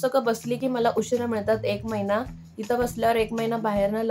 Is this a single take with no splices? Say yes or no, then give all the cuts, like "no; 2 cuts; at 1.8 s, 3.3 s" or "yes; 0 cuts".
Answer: yes; 0 cuts